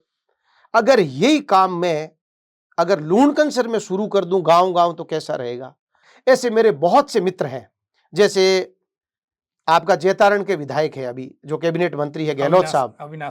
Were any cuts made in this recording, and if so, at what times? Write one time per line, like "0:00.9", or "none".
0:06.0